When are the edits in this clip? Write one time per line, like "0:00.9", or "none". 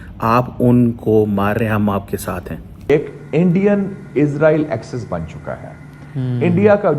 0:02.8